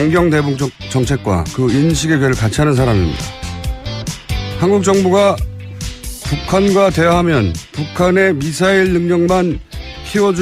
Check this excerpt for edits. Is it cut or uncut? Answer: cut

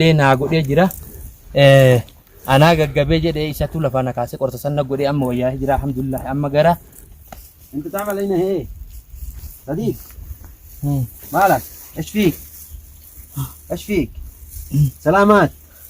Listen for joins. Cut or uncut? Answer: cut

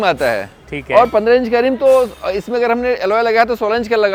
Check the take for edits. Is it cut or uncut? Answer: uncut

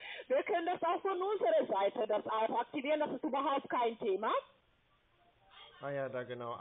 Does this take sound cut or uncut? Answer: cut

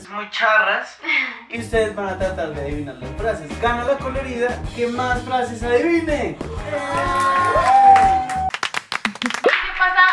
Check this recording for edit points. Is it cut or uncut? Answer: uncut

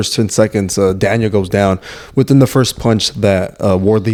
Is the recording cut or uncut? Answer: uncut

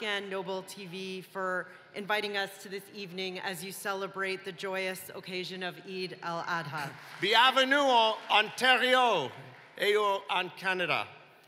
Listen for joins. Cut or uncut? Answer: cut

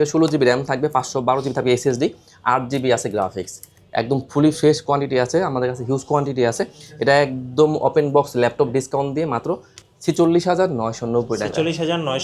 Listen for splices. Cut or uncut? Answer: uncut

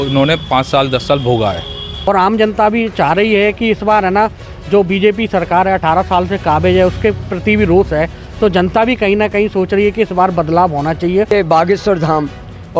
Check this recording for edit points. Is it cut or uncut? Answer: cut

